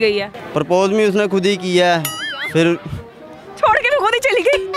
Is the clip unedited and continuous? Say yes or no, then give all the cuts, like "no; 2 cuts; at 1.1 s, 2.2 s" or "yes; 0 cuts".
yes; 0 cuts